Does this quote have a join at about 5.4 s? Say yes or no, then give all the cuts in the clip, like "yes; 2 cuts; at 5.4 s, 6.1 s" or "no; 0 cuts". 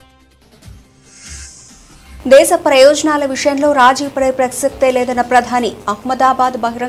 no; 1 cut; at 2.2 s